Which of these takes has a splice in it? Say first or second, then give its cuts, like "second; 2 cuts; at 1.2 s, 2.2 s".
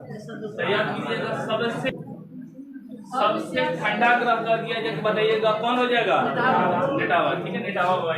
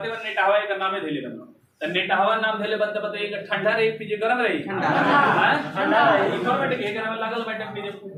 first; 1 cut; at 1.9 s